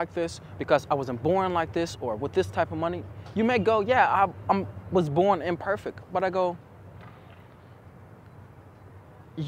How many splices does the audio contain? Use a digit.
0